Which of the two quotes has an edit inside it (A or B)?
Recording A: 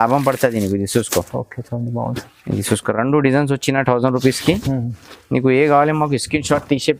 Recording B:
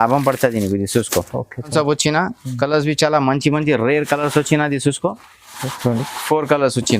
B